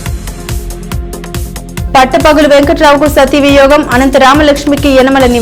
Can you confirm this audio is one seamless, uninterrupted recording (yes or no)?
yes